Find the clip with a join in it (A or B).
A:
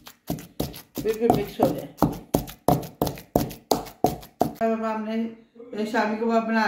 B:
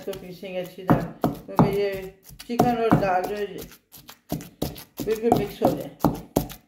A